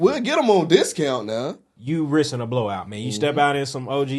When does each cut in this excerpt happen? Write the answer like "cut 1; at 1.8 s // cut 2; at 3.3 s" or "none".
cut 1; at 1.6 s